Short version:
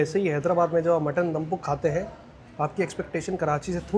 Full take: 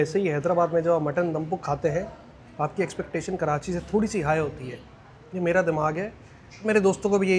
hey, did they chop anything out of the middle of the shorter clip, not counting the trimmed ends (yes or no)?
no